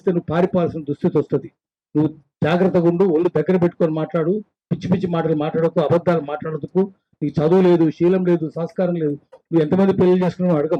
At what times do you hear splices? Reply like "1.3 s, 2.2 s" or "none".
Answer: none